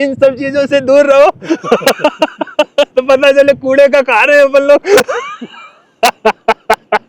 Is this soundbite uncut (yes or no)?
yes